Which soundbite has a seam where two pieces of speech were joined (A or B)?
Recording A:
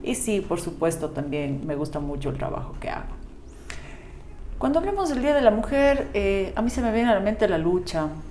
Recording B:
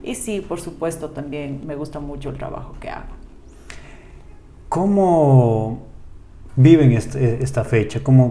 A